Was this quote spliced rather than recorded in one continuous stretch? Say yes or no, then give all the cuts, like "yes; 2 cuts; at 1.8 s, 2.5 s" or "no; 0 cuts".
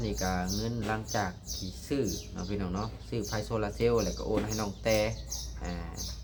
no; 0 cuts